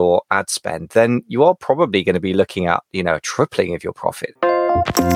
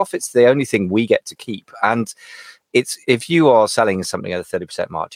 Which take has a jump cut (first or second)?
first